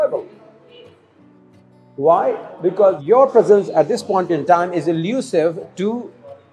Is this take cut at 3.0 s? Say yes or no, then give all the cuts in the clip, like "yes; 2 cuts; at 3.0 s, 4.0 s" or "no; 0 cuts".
yes; 1 cut; at 3.0 s